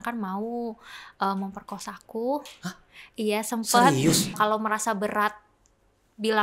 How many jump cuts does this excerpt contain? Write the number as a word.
one